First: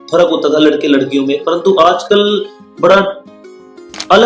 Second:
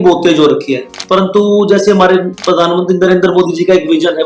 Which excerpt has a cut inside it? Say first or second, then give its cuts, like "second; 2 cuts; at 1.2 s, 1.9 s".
second; 1 cut; at 0.9 s